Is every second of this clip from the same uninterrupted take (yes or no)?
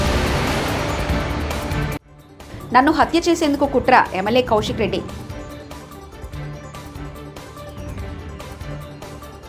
yes